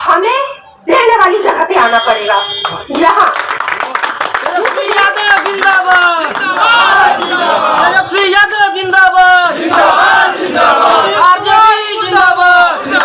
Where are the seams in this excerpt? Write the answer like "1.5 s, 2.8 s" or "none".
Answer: none